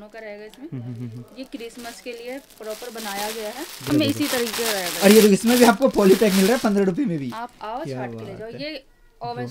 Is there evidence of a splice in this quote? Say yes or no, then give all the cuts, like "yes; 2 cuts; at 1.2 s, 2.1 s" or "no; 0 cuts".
yes; 1 cut; at 3.9 s